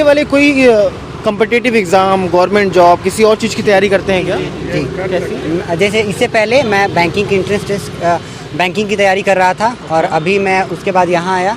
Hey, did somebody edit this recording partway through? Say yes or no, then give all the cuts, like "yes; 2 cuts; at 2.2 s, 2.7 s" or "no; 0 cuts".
no; 0 cuts